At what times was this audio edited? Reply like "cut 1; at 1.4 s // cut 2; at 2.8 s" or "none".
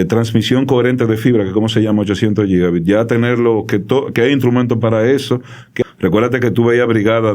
cut 1; at 5.7 s